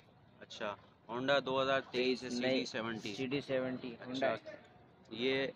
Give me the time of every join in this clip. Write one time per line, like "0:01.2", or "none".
none